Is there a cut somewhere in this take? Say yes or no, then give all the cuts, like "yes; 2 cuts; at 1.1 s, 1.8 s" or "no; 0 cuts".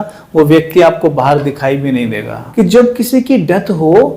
yes; 1 cut; at 2.4 s